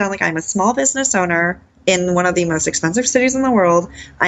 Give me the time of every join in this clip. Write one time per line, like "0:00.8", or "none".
0:01.7